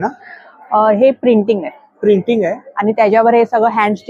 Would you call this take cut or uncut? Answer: uncut